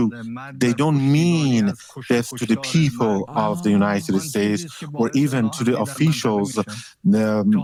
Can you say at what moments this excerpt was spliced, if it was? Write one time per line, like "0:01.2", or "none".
none